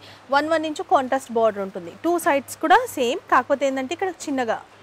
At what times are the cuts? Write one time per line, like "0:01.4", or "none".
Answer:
none

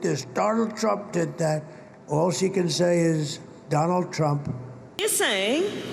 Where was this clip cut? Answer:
0:05.0

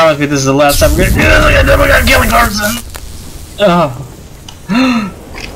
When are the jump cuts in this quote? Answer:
none

